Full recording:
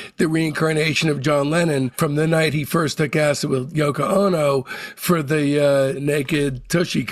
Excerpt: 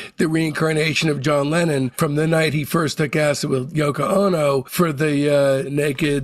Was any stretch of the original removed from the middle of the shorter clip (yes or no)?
yes